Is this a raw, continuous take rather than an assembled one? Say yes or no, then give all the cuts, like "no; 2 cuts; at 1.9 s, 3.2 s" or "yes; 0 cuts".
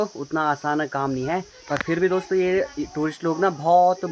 yes; 0 cuts